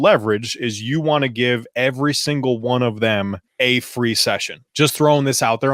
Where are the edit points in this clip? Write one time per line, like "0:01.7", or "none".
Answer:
0:03.4
0:04.6